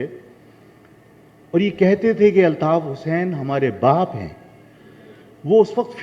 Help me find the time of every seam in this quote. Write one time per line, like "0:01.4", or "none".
none